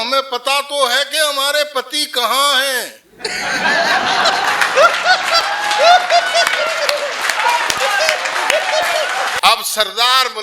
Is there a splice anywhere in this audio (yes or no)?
yes